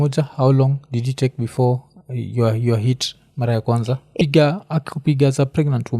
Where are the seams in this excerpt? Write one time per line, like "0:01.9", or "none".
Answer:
0:04.2